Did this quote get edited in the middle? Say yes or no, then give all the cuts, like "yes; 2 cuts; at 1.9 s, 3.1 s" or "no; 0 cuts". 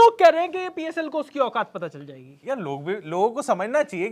no; 0 cuts